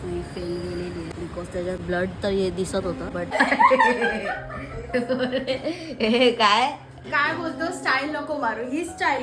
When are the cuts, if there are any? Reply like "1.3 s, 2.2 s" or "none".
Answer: 3.3 s